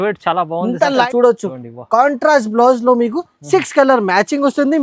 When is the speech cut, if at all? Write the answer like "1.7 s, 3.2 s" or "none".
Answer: 1.1 s